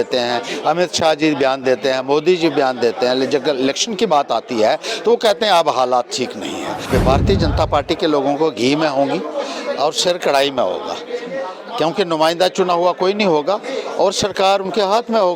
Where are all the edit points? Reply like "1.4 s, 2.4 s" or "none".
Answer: 6.9 s